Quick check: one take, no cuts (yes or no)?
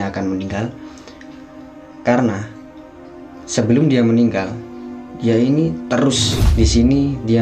no